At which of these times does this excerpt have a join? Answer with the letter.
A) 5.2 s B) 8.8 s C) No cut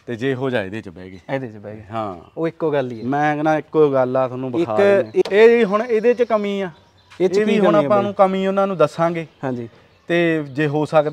A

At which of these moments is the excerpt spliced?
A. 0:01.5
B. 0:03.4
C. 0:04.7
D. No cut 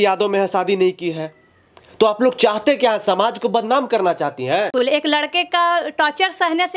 C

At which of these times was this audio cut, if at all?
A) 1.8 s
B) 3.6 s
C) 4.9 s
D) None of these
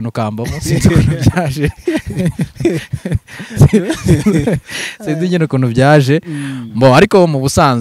D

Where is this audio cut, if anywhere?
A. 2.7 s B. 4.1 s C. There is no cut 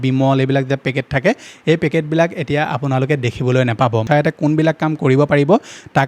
B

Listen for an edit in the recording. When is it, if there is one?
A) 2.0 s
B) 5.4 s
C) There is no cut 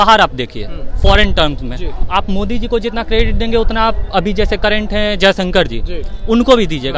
A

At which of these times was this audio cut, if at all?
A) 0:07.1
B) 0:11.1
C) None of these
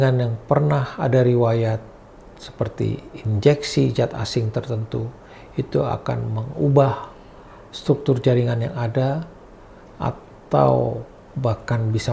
C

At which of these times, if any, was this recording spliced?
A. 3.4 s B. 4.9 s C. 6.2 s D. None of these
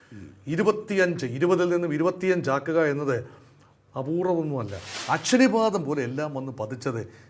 B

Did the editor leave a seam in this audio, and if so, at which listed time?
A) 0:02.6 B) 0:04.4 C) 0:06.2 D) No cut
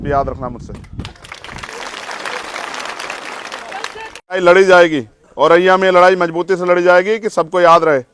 B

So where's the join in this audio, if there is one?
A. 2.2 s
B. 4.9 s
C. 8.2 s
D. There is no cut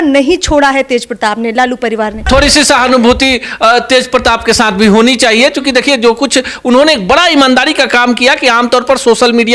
A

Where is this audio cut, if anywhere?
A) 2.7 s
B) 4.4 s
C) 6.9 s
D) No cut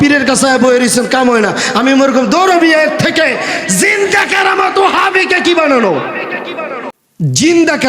C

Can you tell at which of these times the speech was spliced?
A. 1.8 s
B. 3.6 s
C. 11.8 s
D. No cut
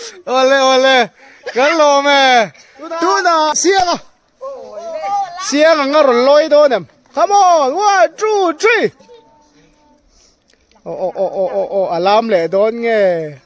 B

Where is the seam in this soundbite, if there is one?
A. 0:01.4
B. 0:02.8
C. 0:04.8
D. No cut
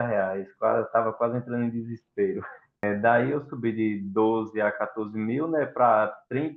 B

